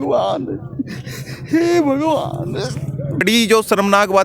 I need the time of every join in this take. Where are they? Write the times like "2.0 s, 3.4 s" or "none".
3.2 s